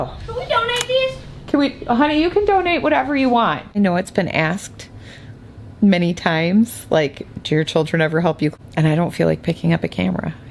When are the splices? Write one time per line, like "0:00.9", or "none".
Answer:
0:03.8
0:08.5